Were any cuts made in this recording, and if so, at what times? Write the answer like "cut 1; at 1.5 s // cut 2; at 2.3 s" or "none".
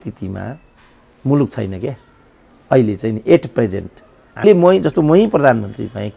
cut 1; at 4.4 s